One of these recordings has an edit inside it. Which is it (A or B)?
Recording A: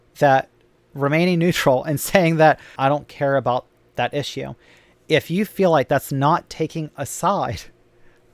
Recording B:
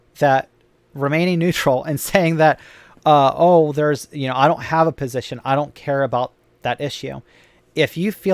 A